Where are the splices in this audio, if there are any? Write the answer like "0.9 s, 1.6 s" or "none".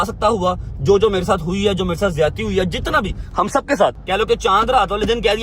4.0 s